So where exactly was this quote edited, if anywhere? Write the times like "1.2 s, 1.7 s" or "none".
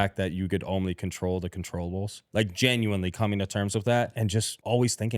4.2 s